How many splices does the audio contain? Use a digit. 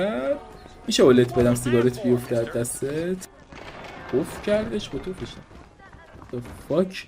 1